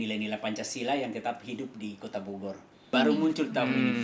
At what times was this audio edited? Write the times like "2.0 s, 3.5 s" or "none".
2.9 s